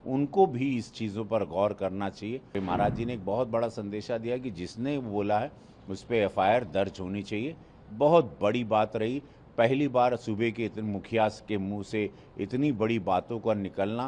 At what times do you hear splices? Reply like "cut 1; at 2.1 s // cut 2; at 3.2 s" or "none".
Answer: cut 1; at 2.6 s